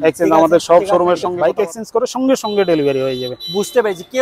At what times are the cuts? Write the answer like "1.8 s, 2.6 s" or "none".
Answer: 1.3 s